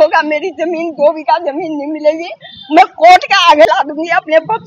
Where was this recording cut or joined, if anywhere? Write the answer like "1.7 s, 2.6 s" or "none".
none

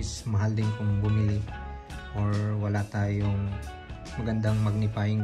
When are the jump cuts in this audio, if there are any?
4.0 s

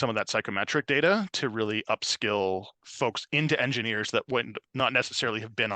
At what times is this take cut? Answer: 2.8 s

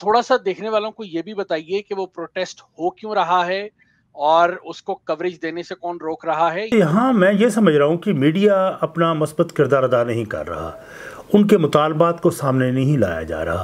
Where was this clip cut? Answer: 6.7 s

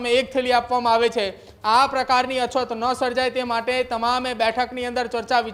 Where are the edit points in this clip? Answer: none

